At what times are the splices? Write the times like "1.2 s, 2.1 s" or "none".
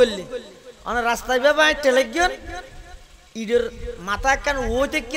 none